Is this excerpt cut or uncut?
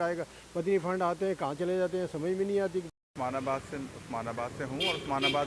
cut